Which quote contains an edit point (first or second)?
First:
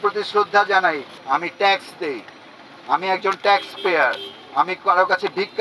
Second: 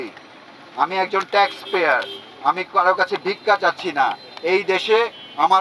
first